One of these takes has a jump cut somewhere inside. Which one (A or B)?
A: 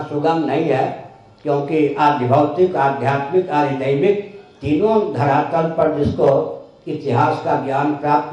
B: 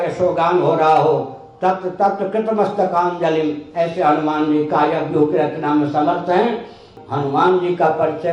B